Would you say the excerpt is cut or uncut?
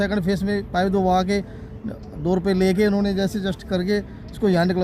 uncut